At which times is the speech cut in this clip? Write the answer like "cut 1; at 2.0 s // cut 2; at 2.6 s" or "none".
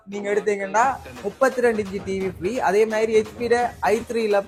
none